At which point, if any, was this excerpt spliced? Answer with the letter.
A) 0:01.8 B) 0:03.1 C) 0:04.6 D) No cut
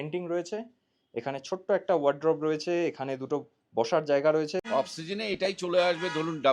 C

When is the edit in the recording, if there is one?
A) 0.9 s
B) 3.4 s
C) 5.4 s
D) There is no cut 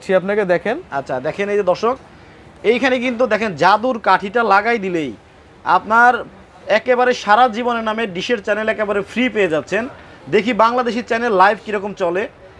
D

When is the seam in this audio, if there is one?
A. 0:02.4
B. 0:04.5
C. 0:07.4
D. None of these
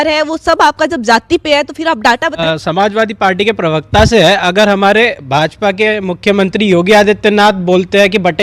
A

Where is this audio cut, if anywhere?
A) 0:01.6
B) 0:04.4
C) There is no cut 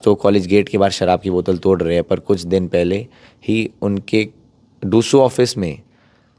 C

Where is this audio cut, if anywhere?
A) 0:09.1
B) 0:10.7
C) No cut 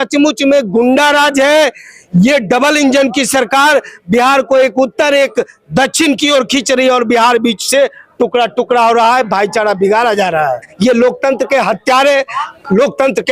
B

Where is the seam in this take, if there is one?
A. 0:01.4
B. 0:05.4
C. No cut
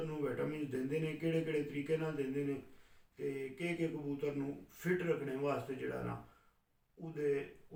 C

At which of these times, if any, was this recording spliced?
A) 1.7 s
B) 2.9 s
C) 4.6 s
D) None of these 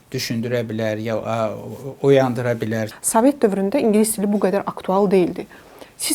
B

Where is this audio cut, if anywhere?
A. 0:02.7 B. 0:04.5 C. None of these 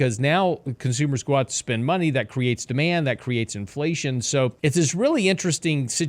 B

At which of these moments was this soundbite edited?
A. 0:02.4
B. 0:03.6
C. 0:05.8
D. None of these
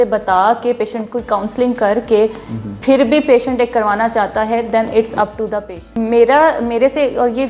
C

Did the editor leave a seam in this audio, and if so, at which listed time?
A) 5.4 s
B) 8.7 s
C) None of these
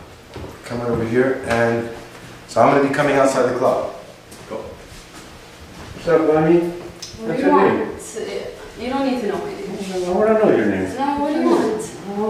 A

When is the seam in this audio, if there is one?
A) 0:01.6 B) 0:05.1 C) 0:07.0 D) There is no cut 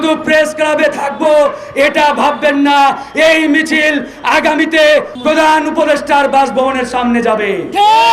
B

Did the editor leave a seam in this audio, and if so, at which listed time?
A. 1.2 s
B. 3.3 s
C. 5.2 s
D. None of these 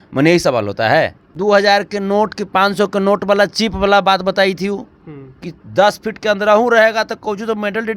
A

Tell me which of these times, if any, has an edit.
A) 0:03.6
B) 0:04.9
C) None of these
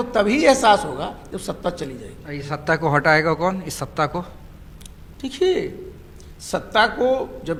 C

